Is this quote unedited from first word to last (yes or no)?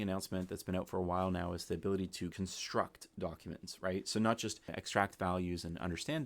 no